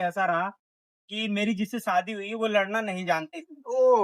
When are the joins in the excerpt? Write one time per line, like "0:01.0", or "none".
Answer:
none